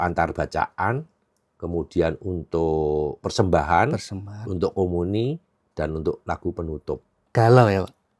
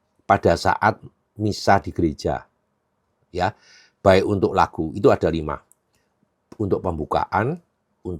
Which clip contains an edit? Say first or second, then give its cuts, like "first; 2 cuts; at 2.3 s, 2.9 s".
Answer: first; 1 cut; at 7.1 s